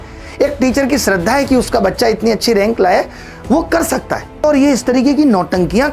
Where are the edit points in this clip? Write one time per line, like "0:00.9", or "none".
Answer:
0:04.4